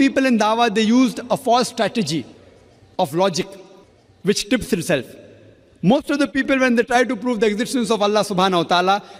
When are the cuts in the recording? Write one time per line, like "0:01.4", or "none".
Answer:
none